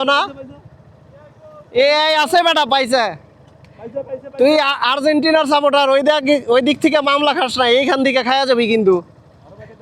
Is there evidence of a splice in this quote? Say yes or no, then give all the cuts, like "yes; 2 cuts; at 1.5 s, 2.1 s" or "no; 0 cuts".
no; 0 cuts